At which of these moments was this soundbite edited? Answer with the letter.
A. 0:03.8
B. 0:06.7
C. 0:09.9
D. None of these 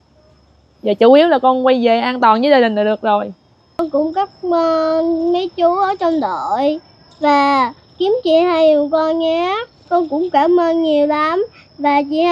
A